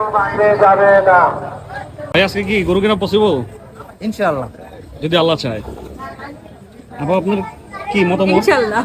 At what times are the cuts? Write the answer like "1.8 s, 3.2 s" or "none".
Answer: 2.1 s